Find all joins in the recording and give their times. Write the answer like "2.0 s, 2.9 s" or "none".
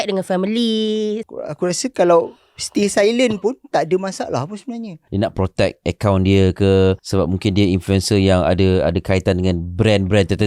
1.2 s, 5.0 s, 7.0 s